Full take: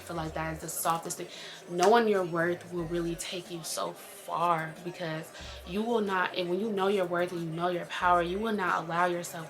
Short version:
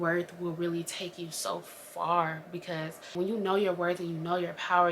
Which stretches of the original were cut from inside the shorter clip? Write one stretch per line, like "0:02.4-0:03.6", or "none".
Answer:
0:05.5-0:06.5